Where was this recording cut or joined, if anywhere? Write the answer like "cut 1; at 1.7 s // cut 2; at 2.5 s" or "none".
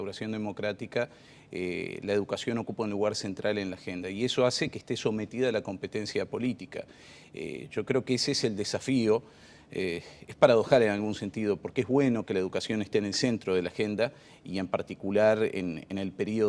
cut 1; at 8.2 s